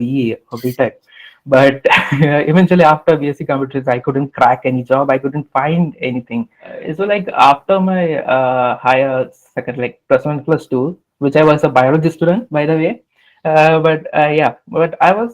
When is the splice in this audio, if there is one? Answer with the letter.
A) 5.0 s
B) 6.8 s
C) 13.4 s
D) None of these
B